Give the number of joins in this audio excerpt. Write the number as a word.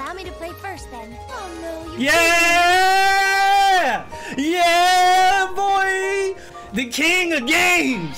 one